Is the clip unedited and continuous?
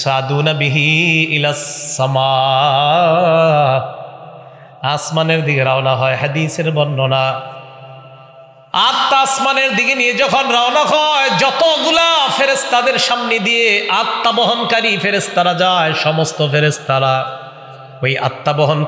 yes; 0 cuts

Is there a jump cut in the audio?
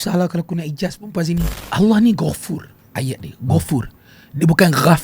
yes; 1 cut; at 1.6 s

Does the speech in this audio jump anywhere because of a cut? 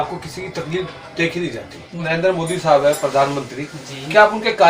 yes; 1 cut; at 2.0 s

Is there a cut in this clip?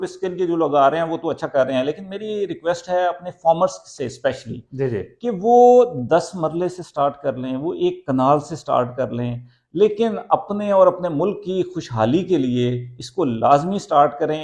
no; 0 cuts

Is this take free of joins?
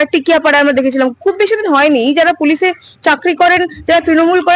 yes; 0 cuts

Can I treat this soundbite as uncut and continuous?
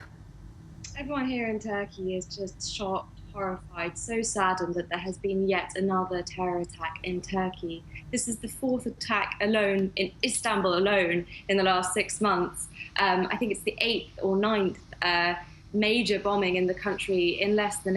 yes; 0 cuts

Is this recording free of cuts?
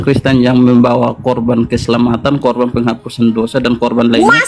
yes; 0 cuts

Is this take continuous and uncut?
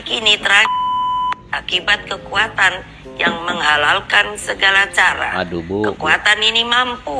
yes; 0 cuts

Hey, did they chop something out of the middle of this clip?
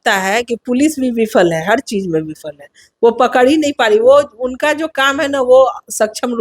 no; 0 cuts

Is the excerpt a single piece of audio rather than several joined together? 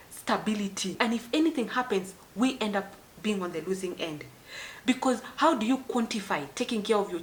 yes; 0 cuts

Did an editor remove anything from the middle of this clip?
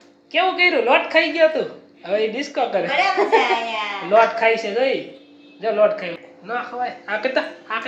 yes; 1 cut; at 6.1 s

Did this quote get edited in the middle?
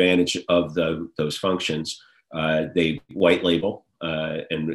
no; 0 cuts

